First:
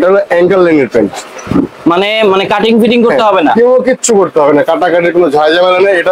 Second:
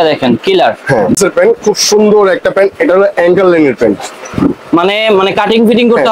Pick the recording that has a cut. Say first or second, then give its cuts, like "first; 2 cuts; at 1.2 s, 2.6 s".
second; 1 cut; at 1.2 s